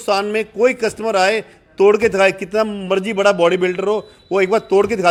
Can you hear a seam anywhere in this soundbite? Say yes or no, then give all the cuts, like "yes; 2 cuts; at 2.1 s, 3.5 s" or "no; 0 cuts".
no; 0 cuts